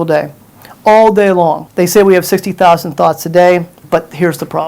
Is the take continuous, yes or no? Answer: no